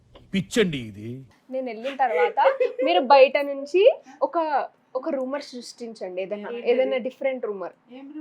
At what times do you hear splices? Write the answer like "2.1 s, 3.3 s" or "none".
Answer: 1.2 s